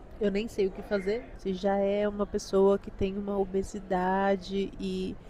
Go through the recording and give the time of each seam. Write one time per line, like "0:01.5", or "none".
0:01.4